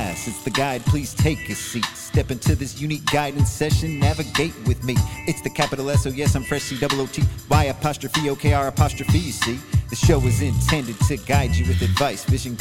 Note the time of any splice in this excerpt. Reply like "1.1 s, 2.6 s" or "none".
none